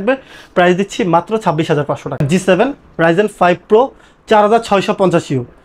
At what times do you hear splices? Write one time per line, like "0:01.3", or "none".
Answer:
0:02.2